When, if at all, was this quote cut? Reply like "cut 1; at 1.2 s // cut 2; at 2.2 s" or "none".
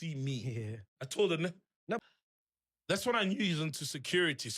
cut 1; at 2.0 s